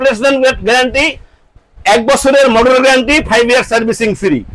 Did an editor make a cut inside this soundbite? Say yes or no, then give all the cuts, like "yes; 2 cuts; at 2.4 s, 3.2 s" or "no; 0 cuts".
no; 0 cuts